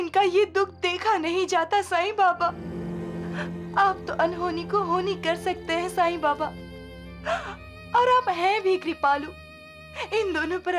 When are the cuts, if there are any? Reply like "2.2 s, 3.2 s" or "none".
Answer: 2.7 s